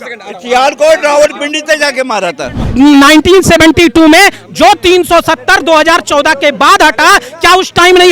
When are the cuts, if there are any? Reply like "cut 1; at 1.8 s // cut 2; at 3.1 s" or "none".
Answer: cut 1; at 2.6 s